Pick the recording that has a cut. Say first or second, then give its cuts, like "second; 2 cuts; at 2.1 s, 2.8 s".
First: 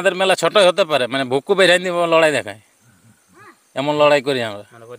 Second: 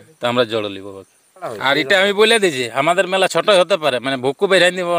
second; 1 cut; at 1.5 s